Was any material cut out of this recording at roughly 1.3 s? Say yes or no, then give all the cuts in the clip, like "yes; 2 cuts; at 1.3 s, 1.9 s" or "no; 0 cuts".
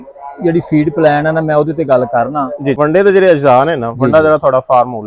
no; 1 cut; at 2.8 s